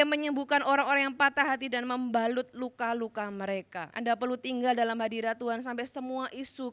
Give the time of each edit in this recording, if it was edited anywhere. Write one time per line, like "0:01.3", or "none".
0:03.8